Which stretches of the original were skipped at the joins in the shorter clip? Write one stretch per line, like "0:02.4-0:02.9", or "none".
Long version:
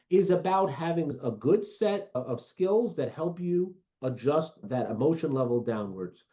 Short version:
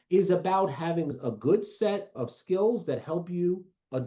0:02.1-0:02.2